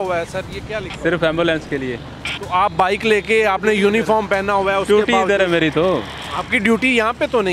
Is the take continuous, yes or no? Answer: yes